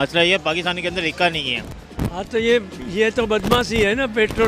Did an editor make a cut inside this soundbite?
yes; 1 cut; at 1.8 s

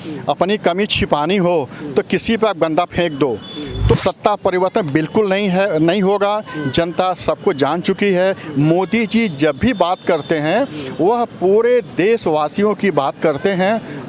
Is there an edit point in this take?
yes; 1 cut; at 3.9 s

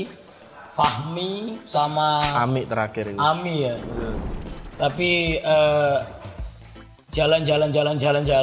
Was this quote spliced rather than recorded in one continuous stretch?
no; 0 cuts

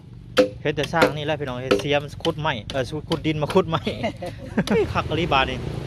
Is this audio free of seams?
no; 1 cut; at 4.8 s

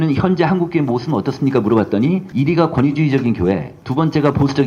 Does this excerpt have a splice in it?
no; 0 cuts

